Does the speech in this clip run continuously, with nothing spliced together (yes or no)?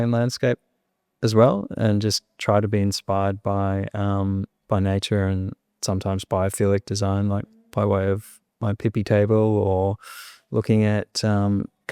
yes